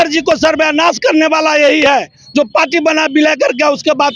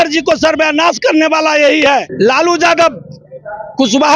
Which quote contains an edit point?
second; 1 cut; at 2.1 s

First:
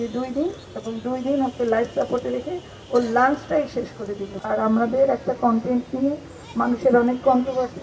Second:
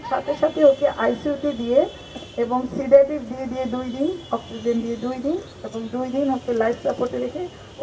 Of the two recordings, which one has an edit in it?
first; 1 cut; at 4.4 s

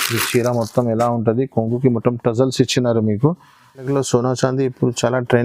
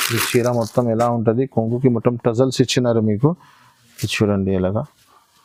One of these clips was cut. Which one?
first; 1 cut; at 3.9 s

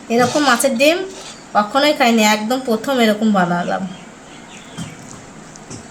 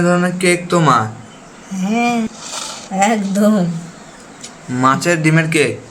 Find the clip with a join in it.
second; 1 cut; at 2.3 s

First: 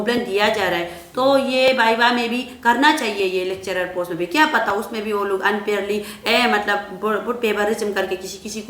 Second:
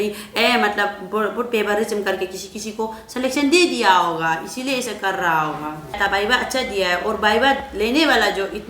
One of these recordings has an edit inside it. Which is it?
second; 1 cut; at 6.0 s

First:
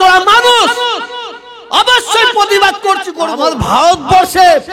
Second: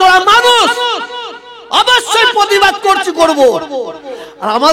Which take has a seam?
first; 1 cut; at 3.2 s

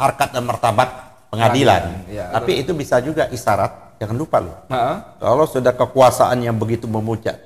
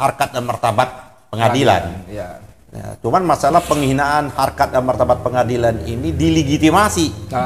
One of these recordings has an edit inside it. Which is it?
first; 1 cut; at 2.4 s

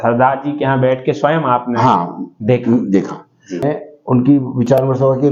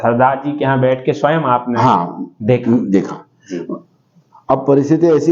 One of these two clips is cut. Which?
first; 1 cut; at 3.6 s

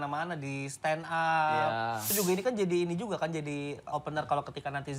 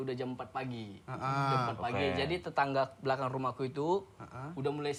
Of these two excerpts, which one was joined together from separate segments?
first; 2 cuts; at 2.1 s, 3.9 s

